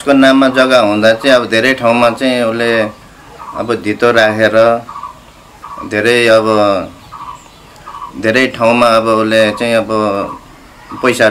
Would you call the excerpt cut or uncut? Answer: uncut